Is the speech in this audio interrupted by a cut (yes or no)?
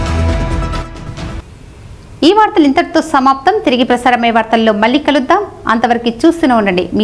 no